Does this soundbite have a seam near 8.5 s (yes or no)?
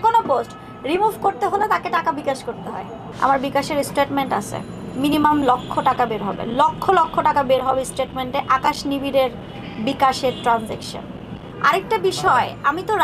no